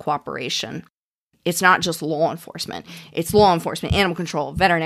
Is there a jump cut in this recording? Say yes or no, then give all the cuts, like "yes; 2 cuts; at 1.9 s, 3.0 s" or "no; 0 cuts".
yes; 1 cut; at 1.2 s